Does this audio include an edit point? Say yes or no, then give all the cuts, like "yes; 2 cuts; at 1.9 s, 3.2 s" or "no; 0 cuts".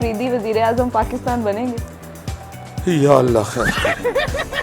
yes; 1 cut; at 3.7 s